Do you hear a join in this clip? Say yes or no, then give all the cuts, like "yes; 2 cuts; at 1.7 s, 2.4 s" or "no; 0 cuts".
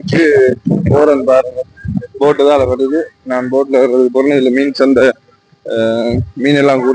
no; 0 cuts